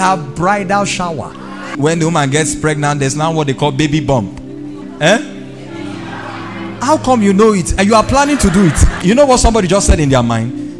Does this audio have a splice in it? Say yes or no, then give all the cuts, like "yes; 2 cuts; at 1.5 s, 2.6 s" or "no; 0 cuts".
yes; 3 cuts; at 1.7 s, 4.8 s, 9.0 s